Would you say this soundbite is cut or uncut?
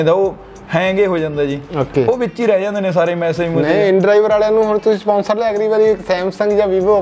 uncut